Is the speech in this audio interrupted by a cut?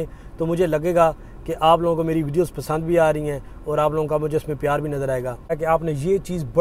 yes; 1 cut; at 5.6 s

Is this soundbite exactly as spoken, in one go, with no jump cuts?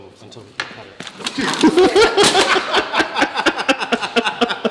yes; 0 cuts

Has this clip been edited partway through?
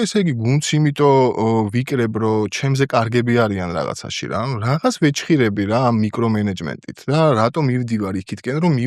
no; 0 cuts

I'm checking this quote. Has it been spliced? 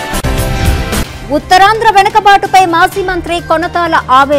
yes; 1 cut; at 0.9 s

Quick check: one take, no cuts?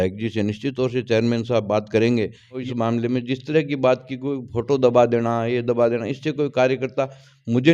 no; 1 cut; at 2.6 s

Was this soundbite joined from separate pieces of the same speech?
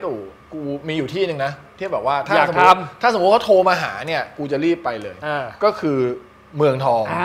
no; 0 cuts

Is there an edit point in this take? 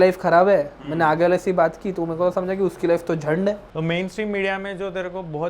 yes; 1 cut; at 3.7 s

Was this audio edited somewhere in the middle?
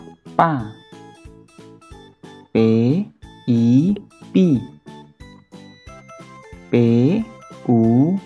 yes; 2 cuts; at 1.1 s, 2.5 s

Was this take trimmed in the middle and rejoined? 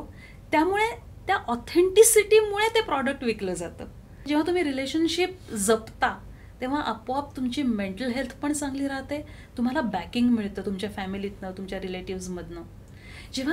yes; 1 cut; at 4.1 s

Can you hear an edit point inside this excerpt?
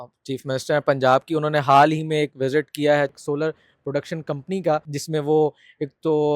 yes; 2 cuts; at 3.1 s, 4.9 s

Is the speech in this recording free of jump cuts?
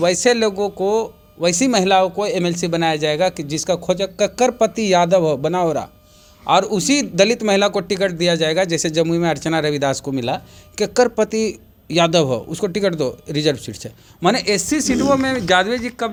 yes; 0 cuts

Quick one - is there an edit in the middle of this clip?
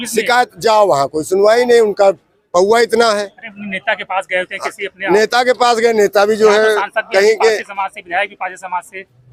no; 0 cuts

